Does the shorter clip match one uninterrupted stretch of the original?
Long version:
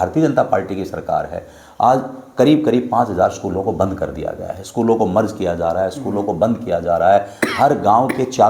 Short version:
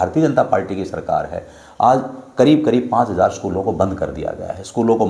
yes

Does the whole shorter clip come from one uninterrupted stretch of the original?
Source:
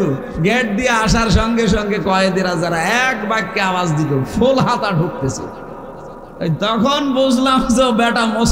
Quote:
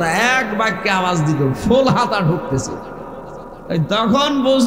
yes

